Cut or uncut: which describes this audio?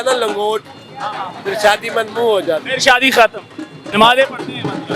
cut